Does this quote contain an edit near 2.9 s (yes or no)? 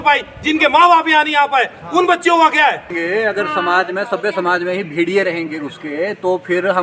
yes